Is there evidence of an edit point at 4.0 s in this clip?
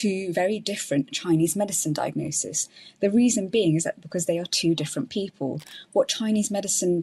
no; 0 cuts

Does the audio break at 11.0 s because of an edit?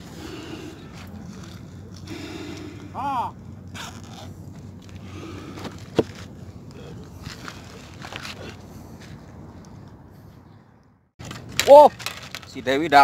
yes; 1 cut; at 11.0 s

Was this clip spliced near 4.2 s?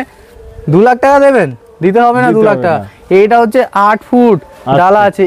no; 0 cuts

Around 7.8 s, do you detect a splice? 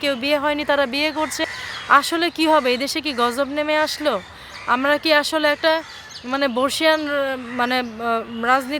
no; 1 cut; at 1.4 s

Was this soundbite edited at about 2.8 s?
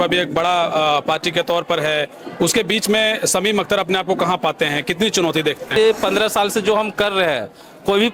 no; 1 cut; at 5.7 s

